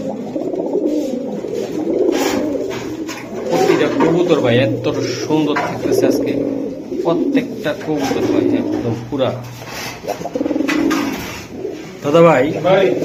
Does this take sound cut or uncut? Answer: uncut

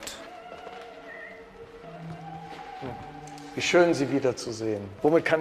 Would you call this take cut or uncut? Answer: cut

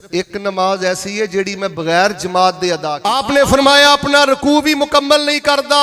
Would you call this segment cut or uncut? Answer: cut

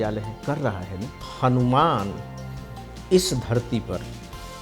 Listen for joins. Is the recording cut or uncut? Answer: cut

